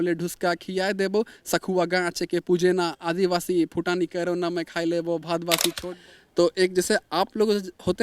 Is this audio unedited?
no; 1 cut; at 5.8 s

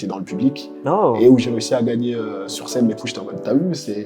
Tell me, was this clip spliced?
yes; 1 cut; at 3.0 s

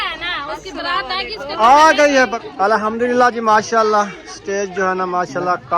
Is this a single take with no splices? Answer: no; 1 cut; at 2.3 s

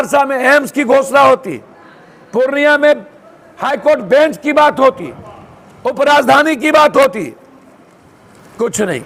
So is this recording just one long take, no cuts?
yes; 0 cuts

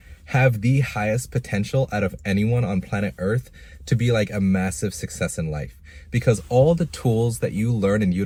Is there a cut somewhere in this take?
no; 0 cuts

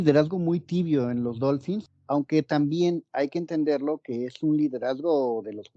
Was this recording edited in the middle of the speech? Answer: no; 0 cuts

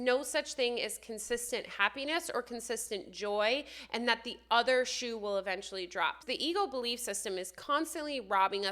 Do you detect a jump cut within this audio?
yes; 1 cut; at 6.2 s

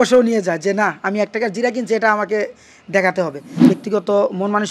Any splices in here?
yes; 1 cut; at 3.5 s

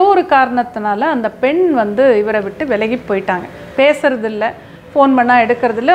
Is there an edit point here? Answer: no; 0 cuts

